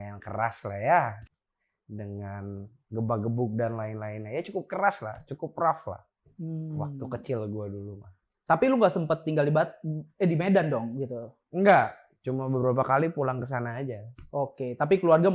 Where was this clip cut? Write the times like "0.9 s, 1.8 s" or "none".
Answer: none